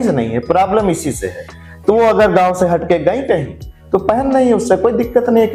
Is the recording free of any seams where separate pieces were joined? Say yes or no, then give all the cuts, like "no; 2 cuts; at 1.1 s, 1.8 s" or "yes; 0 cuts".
yes; 0 cuts